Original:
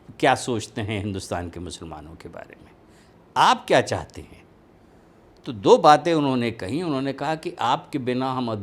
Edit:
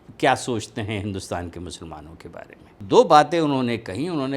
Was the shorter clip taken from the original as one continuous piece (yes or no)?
no